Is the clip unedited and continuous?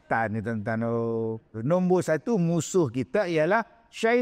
no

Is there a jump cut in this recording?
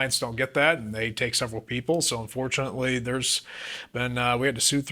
no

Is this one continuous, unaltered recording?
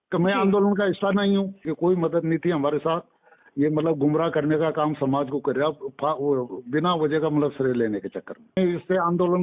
no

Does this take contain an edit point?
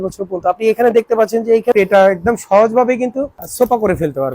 yes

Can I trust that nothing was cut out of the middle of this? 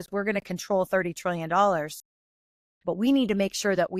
yes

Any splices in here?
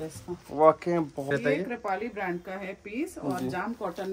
yes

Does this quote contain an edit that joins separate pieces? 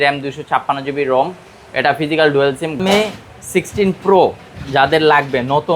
yes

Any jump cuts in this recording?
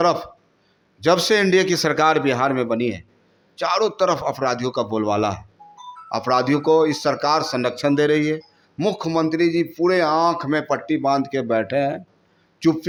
no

